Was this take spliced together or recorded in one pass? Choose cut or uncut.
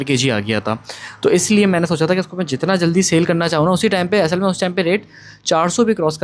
uncut